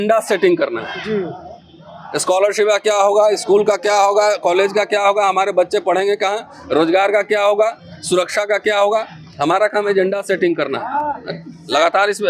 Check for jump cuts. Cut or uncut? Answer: uncut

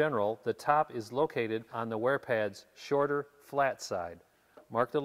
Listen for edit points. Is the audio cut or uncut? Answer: cut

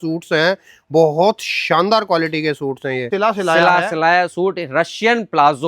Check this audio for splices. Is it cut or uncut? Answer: cut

